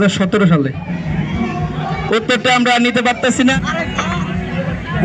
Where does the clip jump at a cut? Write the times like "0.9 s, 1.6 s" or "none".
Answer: 3.6 s